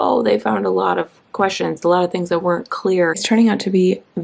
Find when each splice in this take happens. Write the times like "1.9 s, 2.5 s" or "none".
3.2 s